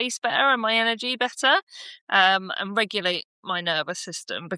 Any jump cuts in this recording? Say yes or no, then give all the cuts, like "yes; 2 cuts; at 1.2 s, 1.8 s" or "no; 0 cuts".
no; 0 cuts